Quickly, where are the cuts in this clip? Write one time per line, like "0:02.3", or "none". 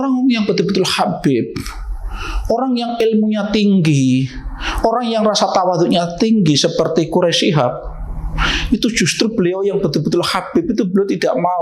none